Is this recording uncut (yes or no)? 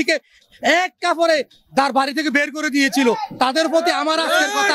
yes